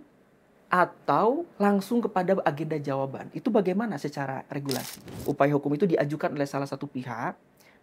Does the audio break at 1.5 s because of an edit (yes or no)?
yes